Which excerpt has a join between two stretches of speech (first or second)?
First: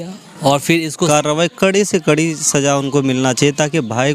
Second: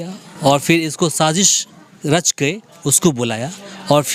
first